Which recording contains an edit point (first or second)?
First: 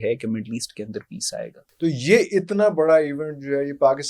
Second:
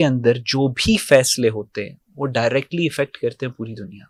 first